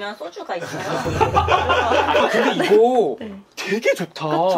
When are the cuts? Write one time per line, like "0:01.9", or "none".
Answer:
0:02.2

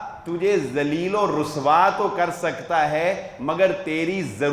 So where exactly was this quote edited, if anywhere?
none

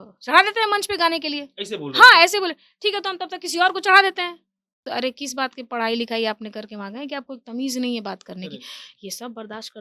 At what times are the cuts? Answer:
0:04.9

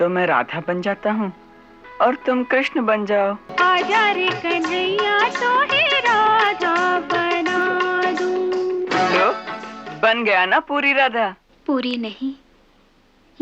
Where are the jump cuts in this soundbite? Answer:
0:03.5
0:11.5

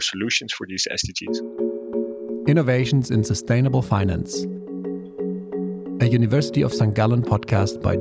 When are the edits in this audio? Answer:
0:01.2

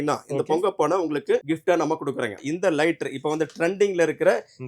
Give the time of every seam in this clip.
0:01.4
0:02.4

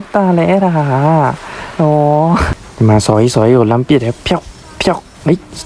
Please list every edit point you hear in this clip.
0:02.6

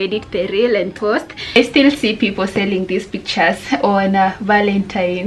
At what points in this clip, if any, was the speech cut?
0:01.4

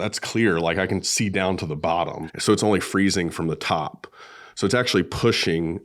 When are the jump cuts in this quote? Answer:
0:02.2

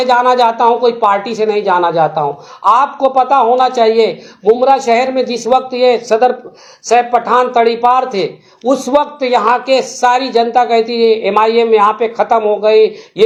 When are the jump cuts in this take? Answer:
none

